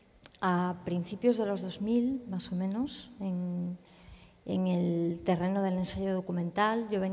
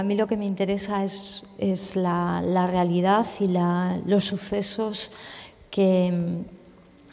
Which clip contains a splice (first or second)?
first